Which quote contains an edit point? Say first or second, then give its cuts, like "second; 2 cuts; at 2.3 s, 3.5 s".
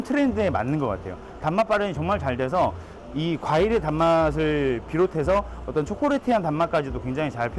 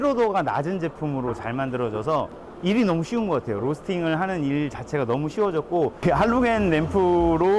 second; 2 cuts; at 2.4 s, 6.0 s